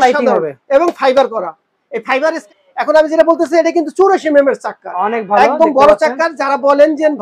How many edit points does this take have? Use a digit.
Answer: 1